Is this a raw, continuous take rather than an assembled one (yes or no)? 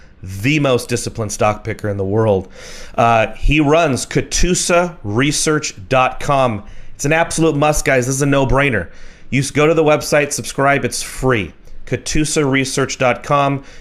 no